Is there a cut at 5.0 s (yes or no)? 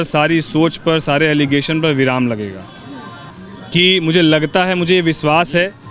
no